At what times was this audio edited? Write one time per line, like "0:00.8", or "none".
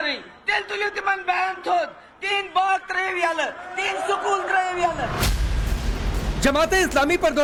none